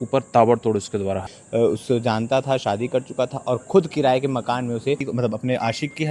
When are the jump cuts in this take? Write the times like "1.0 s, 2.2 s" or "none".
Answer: 1.4 s, 5.0 s